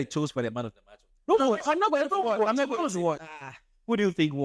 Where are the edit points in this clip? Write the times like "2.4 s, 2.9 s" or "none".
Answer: 1.1 s, 3.2 s